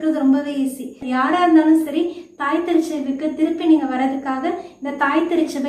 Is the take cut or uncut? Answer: cut